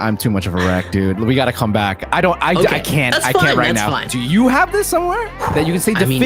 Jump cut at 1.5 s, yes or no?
no